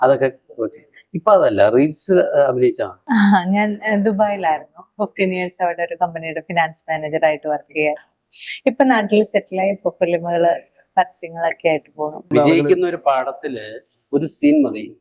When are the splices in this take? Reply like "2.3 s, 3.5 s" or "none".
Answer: 2.9 s, 12.3 s